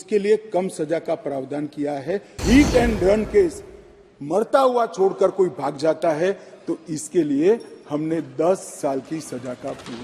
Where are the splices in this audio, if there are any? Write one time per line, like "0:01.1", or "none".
0:02.4